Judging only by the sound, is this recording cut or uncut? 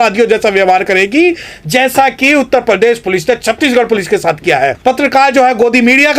cut